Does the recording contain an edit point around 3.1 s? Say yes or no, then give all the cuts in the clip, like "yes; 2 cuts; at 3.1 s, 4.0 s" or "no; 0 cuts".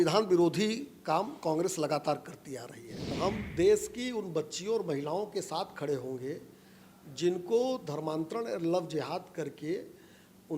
yes; 1 cut; at 3.1 s